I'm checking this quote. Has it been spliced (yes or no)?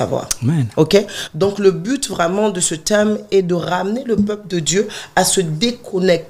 no